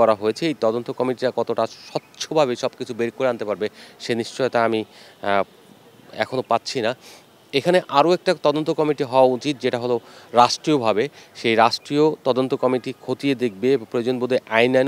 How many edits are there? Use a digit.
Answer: 0